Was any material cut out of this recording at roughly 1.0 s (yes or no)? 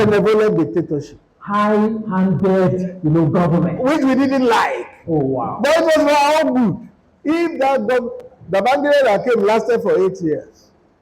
no